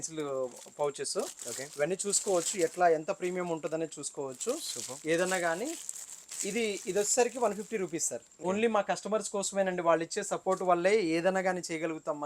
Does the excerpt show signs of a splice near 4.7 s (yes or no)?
no